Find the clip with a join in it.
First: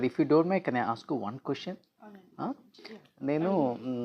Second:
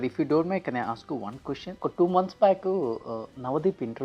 second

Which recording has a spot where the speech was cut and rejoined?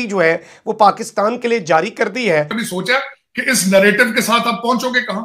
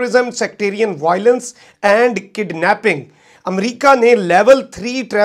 first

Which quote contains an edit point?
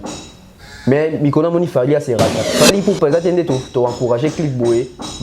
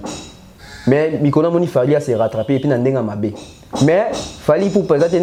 first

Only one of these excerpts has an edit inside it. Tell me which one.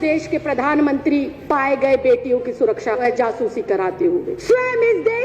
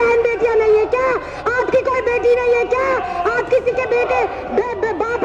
first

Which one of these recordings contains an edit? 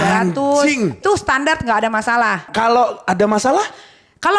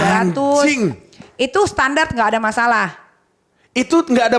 first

